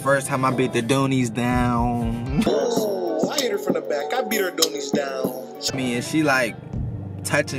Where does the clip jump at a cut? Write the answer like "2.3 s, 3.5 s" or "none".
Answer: 2.6 s, 5.7 s